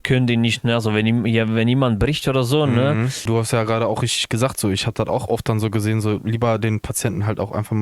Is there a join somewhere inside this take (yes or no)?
yes